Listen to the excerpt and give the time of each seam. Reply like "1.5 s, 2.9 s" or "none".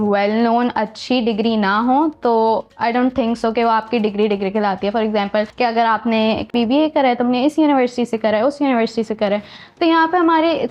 2.7 s, 5.5 s, 6.5 s